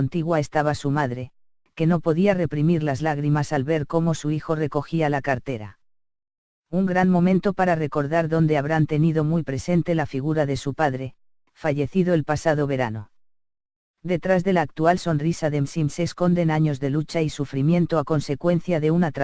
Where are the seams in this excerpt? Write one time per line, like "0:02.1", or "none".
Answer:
0:01.7